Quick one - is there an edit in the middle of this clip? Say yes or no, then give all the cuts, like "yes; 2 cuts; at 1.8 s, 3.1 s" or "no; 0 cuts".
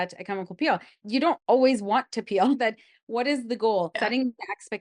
yes; 3 cuts; at 1.0 s, 2.6 s, 4.0 s